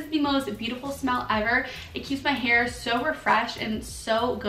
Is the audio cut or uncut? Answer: uncut